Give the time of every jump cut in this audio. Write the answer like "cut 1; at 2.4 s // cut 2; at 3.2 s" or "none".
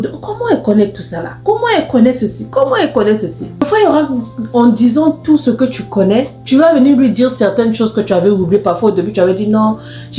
cut 1; at 3.6 s